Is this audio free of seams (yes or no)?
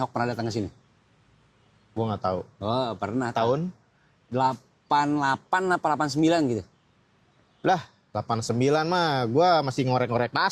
yes